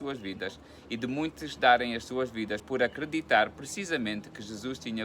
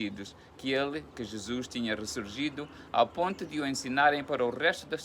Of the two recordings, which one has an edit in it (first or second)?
first